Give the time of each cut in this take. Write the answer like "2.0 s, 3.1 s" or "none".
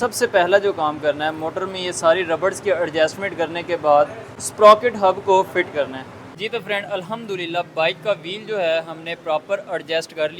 6.2 s